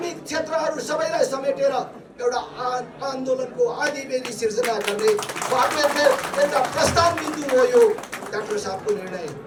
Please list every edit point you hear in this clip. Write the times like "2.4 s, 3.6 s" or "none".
none